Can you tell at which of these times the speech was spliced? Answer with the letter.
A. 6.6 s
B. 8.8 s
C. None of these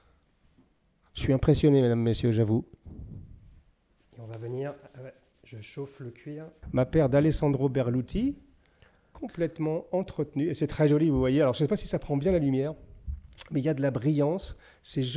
A